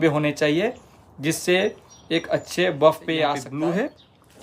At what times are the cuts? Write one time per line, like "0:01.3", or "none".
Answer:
0:03.5